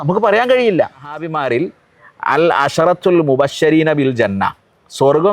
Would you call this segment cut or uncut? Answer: cut